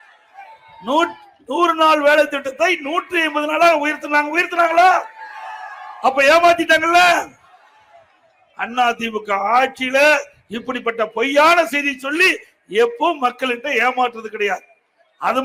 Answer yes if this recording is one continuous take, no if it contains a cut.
yes